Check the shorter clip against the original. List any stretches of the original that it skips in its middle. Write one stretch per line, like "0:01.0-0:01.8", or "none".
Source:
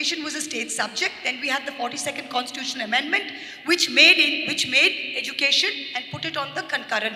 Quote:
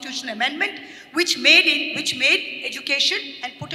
none